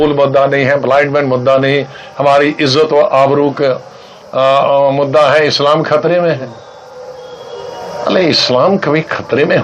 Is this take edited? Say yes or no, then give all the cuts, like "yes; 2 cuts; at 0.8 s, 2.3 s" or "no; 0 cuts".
no; 0 cuts